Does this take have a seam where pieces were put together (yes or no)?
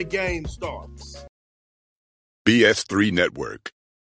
yes